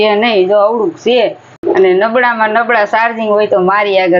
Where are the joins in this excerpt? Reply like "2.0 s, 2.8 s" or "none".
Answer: 1.5 s

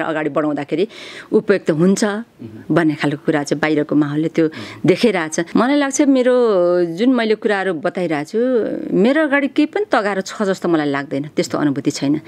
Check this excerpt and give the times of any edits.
5.5 s

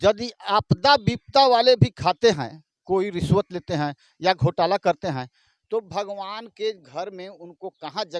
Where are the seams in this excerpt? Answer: none

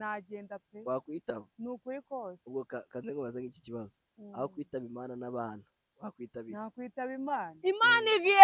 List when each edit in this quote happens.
7.5 s

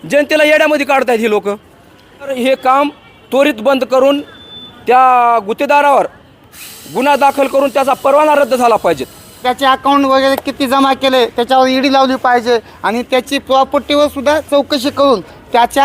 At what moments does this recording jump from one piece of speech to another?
2.3 s, 9.4 s

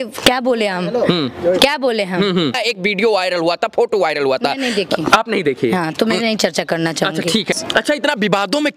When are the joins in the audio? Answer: 2.6 s, 7.6 s

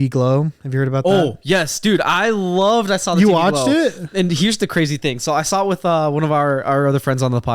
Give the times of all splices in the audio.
none

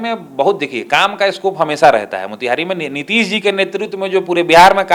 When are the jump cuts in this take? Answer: none

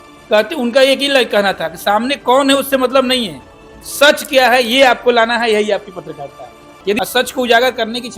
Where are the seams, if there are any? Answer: 7.0 s

